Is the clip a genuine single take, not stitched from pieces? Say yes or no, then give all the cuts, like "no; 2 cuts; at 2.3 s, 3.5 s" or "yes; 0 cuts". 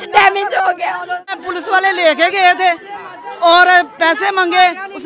no; 1 cut; at 1.4 s